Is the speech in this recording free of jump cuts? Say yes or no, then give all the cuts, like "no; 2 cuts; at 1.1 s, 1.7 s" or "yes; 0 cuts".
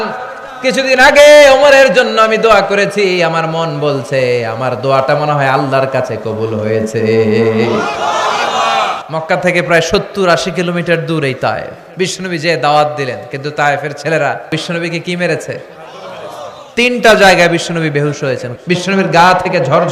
no; 4 cuts; at 9.0 s, 11.8 s, 14.5 s, 18.5 s